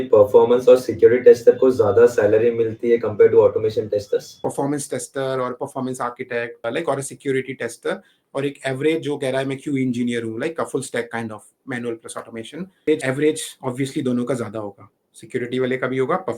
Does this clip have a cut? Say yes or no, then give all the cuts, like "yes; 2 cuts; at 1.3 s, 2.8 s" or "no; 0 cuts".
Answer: yes; 3 cuts; at 4.4 s, 6.6 s, 12.9 s